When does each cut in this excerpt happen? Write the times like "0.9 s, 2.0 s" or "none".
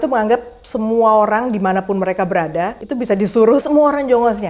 2.8 s, 3.6 s